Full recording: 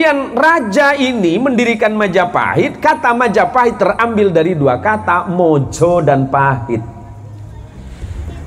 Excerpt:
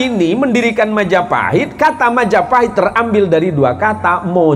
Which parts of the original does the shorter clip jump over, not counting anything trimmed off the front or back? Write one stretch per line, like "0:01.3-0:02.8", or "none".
none